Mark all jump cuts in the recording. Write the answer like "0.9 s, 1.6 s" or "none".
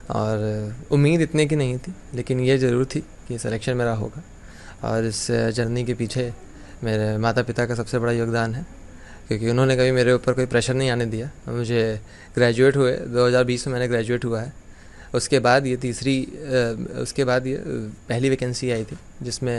none